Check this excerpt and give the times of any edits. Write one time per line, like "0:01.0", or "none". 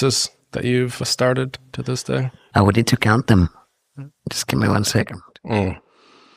0:01.0
0:02.4
0:04.1